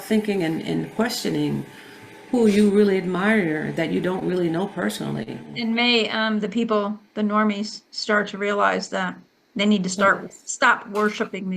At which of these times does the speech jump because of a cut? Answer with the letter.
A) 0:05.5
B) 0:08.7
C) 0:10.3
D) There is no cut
A